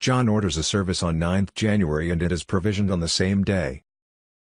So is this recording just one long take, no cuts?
no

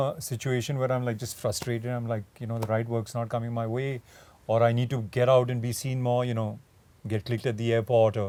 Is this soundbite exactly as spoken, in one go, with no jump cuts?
yes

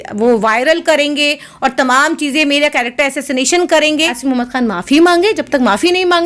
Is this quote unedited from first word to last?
no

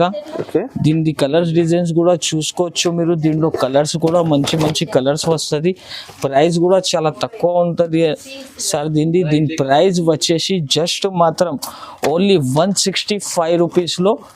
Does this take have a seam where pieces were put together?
no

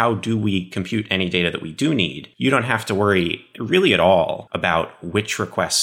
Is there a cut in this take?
yes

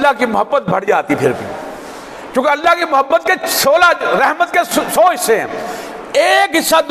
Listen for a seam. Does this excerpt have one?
no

